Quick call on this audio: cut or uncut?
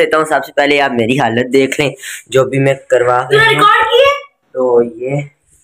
uncut